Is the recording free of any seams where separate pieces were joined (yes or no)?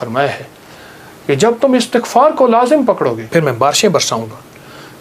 no